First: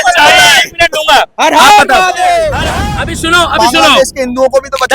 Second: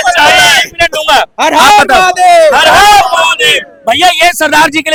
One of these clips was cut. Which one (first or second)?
first